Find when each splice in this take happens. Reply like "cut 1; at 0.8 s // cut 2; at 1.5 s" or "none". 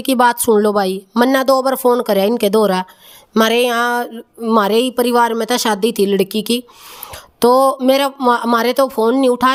none